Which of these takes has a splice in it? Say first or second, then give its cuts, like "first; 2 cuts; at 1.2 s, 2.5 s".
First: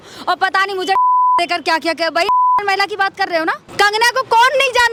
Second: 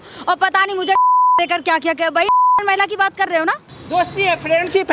second; 1 cut; at 3.6 s